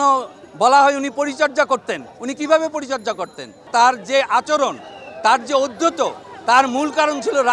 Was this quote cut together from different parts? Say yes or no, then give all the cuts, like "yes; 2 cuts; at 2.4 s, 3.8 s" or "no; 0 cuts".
yes; 1 cut; at 3.6 s